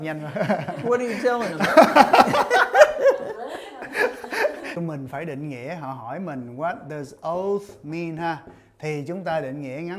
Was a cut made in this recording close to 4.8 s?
yes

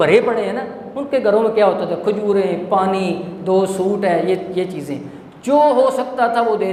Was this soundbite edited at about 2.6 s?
no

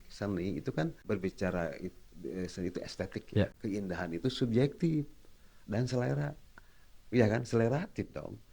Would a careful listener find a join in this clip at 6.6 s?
no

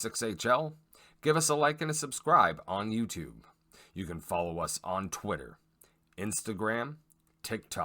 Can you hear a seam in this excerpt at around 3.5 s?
no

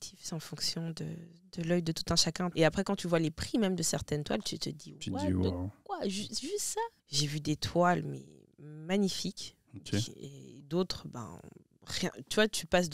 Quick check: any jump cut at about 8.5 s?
no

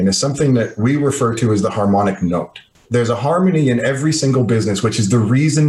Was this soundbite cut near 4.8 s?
no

